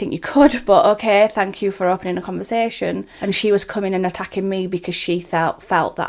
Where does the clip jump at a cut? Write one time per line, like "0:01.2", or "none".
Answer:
0:03.1